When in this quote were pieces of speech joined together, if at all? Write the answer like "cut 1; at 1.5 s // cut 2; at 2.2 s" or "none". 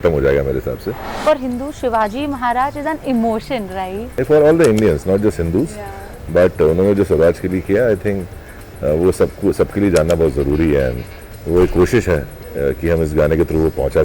cut 1; at 1.1 s